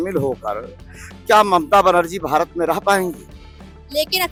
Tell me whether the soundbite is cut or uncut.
uncut